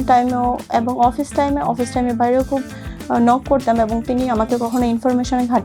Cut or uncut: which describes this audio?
uncut